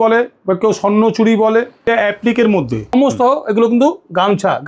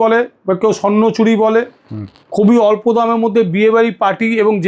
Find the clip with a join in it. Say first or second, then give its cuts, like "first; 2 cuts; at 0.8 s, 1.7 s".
first; 2 cuts; at 1.8 s, 2.9 s